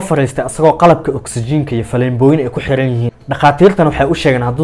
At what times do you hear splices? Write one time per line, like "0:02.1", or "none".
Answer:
0:03.0